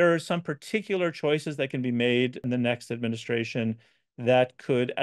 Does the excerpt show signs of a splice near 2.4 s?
yes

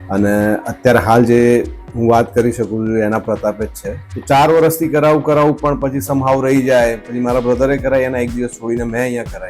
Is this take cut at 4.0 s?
yes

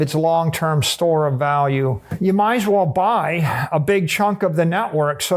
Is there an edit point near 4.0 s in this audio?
no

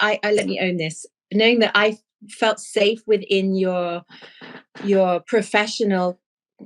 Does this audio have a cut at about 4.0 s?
no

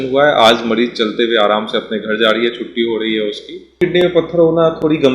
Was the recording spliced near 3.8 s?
yes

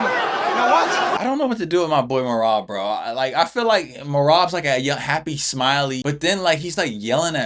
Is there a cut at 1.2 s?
yes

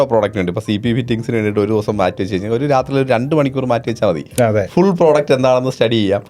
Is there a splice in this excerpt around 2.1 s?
no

